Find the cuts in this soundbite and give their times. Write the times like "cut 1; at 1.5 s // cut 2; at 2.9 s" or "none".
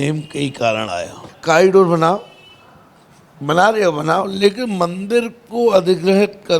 cut 1; at 1.3 s